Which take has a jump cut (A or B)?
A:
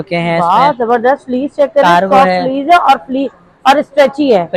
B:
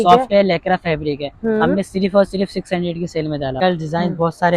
B